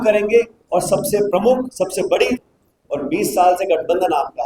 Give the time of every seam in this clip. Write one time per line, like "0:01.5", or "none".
0:02.4